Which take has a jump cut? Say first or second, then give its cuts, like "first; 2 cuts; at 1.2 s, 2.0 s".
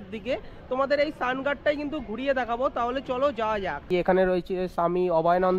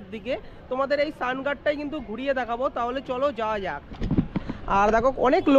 first; 1 cut; at 3.9 s